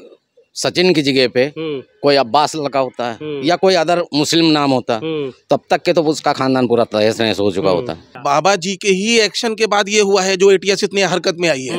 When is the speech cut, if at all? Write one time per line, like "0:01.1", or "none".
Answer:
0:08.1